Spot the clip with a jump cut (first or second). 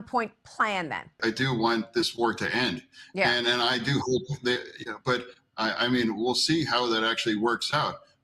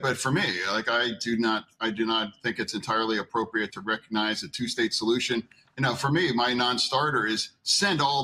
first